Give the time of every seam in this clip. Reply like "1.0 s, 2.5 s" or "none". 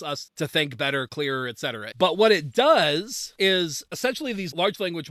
3.2 s, 3.8 s